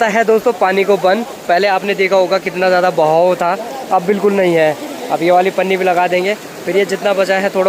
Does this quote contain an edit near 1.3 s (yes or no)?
no